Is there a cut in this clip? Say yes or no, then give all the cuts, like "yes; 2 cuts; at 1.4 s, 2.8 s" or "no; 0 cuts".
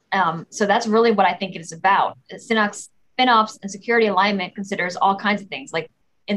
no; 0 cuts